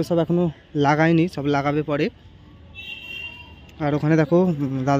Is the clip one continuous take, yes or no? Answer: yes